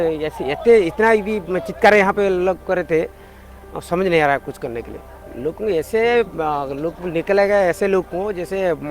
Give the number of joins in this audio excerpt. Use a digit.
1